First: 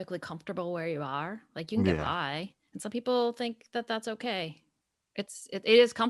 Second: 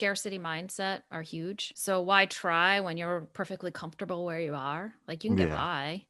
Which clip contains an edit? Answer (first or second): second